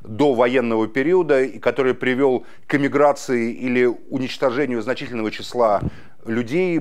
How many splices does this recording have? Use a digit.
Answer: 0